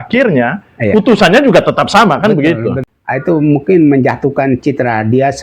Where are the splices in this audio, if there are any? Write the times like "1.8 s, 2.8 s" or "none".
2.9 s